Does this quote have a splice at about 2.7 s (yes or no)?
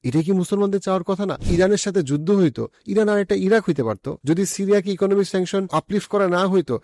no